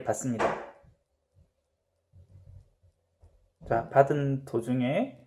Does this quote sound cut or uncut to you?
uncut